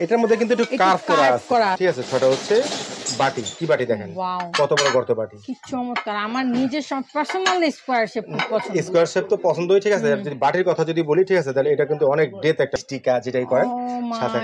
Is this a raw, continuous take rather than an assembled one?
no; 2 cuts; at 1.8 s, 12.8 s

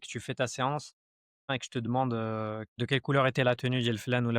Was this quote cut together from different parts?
yes; 2 cuts; at 1.5 s, 2.7 s

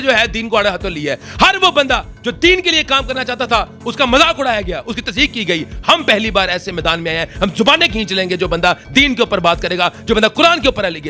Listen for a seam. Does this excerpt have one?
no; 0 cuts

